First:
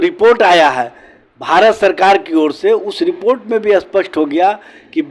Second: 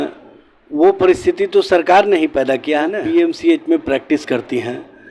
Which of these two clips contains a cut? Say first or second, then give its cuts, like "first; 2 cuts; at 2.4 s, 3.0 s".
second; 1 cut; at 3.0 s